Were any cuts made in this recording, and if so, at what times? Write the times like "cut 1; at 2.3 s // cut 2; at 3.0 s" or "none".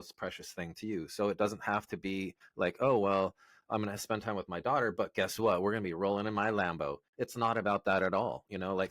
cut 1; at 2.4 s